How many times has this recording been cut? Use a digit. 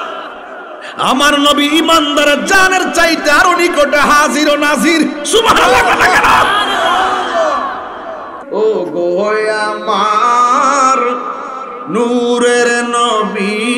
1